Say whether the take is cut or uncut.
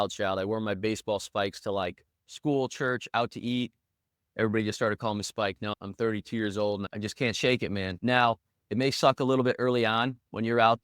cut